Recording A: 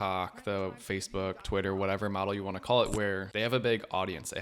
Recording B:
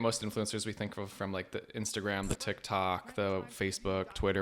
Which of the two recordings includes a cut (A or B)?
A